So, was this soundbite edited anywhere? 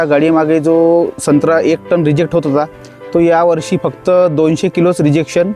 no; 0 cuts

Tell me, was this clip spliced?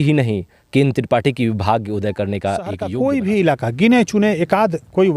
yes; 1 cut; at 2.8 s

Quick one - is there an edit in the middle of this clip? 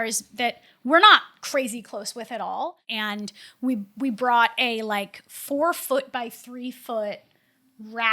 yes; 1 cut; at 2.8 s

